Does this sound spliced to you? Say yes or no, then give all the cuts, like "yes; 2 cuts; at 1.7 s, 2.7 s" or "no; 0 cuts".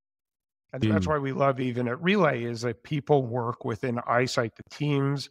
yes; 1 cut; at 1.6 s